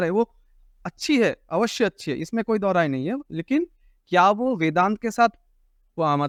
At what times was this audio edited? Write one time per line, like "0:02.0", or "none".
none